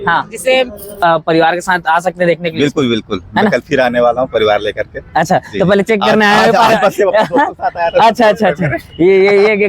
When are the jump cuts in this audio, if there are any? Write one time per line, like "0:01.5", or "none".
0:01.0